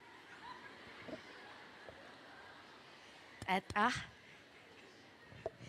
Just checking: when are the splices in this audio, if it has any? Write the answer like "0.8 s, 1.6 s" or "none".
none

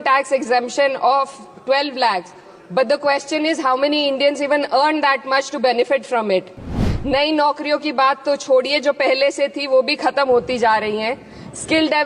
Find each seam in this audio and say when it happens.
6.8 s

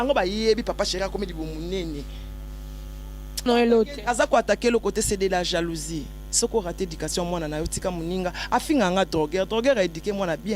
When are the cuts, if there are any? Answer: 3.5 s

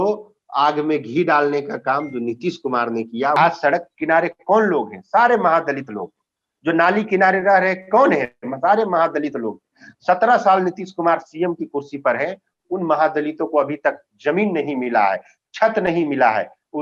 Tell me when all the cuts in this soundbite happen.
3.4 s

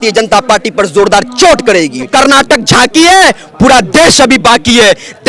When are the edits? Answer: 2.1 s

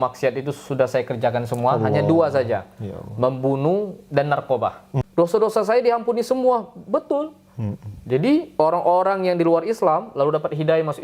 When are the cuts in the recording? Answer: 4.9 s

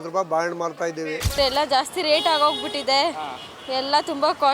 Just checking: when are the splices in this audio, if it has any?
1.4 s

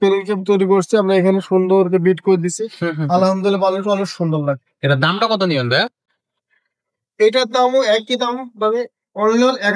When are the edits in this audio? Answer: none

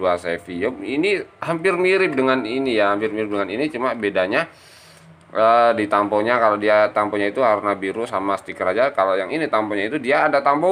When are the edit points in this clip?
none

